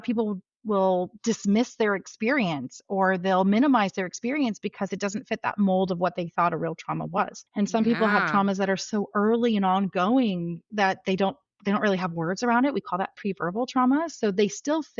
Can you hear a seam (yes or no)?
no